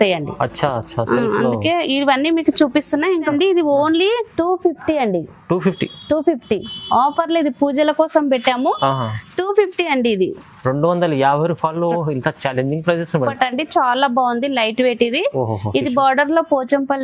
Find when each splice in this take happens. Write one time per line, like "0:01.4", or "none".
0:03.3
0:13.3